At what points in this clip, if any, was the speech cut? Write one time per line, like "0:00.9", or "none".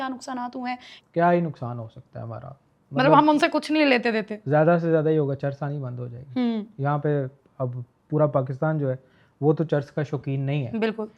0:00.9